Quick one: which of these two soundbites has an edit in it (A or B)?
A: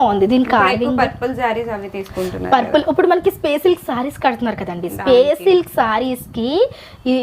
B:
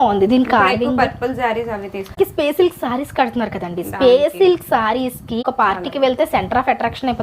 B